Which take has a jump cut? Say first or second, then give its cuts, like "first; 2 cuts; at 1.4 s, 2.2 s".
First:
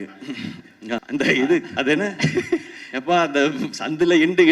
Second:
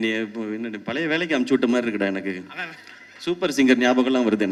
first; 1 cut; at 1.0 s